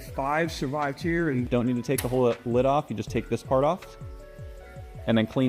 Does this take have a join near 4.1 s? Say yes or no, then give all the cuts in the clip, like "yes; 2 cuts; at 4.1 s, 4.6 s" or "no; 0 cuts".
no; 1 cut; at 1.5 s